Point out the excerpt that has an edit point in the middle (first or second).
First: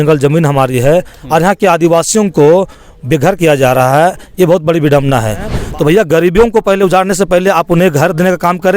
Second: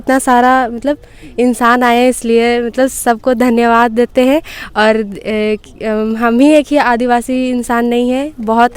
first